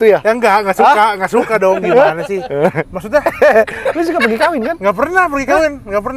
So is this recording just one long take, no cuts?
no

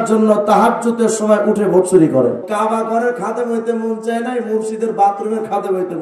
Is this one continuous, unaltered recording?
no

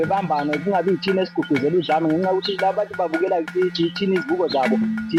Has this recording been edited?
no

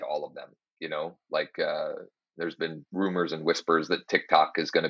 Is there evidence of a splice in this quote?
yes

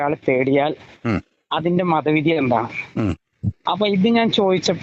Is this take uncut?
yes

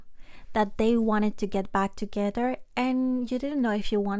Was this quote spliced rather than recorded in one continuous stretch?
no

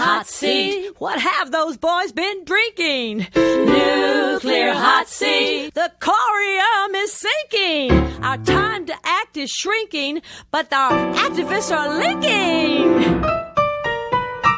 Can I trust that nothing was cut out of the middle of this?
yes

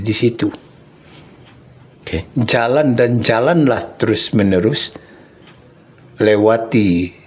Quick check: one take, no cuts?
yes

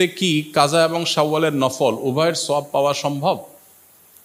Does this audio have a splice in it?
no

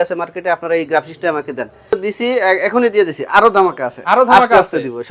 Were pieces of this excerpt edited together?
yes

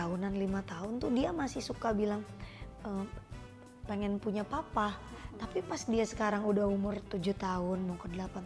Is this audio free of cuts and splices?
yes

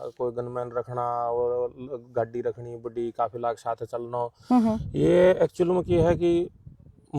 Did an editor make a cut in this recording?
no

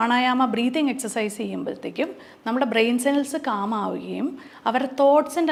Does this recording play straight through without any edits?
yes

